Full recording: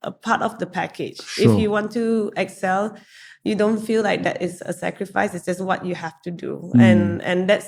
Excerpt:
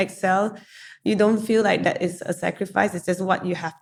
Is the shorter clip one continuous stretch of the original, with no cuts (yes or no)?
yes